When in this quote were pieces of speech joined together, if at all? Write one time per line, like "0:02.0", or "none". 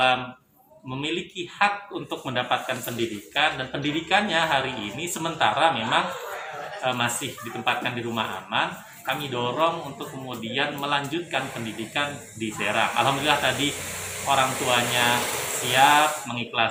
none